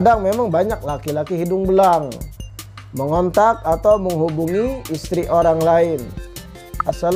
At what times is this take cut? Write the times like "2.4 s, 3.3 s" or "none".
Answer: none